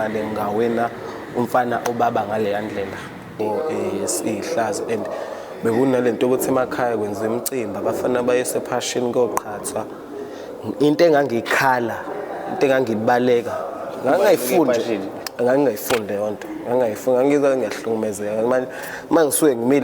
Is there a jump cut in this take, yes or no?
yes